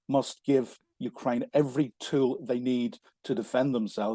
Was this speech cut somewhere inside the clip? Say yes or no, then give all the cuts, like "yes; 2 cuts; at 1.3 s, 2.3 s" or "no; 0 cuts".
no; 0 cuts